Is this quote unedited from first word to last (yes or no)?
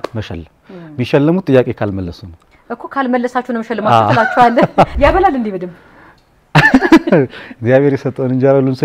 no